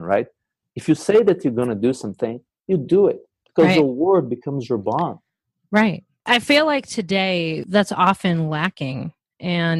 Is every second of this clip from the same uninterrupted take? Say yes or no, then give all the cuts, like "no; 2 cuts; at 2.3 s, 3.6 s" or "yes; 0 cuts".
yes; 0 cuts